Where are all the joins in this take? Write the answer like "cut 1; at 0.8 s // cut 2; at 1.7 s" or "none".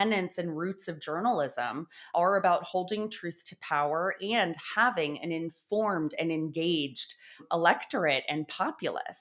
cut 1; at 2.1 s

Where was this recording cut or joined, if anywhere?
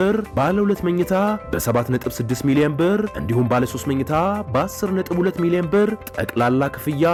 none

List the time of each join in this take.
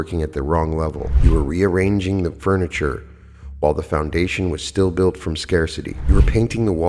cut 1; at 1.1 s // cut 2; at 5.9 s

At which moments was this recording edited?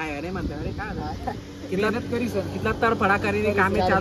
none

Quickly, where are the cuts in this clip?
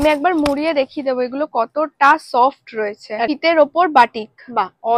cut 1; at 3.3 s

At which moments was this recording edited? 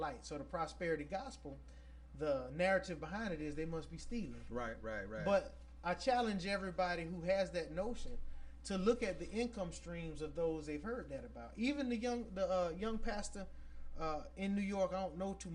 none

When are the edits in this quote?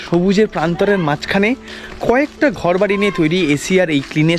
none

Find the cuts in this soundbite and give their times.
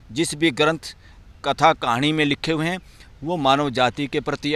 none

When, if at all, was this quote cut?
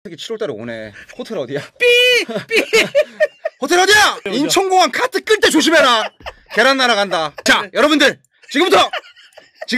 cut 1; at 1.0 s

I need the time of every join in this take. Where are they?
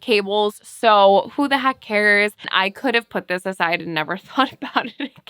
cut 1; at 2.5 s

